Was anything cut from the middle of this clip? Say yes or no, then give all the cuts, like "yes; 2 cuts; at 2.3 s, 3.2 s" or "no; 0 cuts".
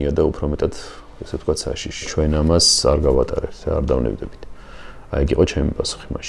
yes; 1 cut; at 2.1 s